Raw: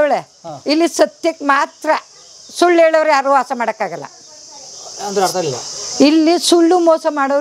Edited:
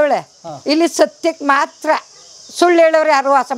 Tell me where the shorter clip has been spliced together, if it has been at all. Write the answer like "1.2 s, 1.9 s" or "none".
none